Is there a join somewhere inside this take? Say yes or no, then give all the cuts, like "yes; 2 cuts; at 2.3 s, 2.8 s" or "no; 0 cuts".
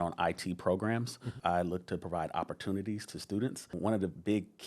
yes; 2 cuts; at 1.3 s, 3.8 s